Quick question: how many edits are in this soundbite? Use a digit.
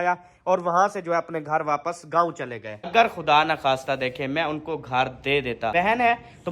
2